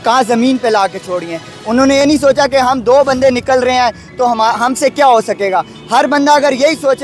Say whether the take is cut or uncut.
uncut